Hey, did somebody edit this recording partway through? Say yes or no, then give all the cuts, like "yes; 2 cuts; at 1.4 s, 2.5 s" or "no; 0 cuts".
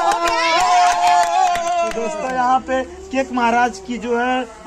yes; 1 cut; at 2.1 s